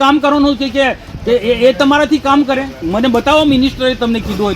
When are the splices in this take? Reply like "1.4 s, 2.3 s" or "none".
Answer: 2.8 s